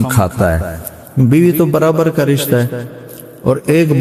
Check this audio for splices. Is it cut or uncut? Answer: uncut